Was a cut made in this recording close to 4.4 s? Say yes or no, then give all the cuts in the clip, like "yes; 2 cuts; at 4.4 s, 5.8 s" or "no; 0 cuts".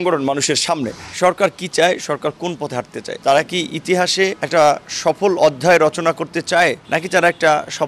yes; 4 cuts; at 1.0 s, 3.0 s, 4.4 s, 6.8 s